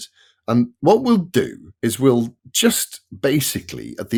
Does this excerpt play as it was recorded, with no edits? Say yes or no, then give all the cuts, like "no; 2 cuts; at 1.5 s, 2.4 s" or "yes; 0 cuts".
yes; 0 cuts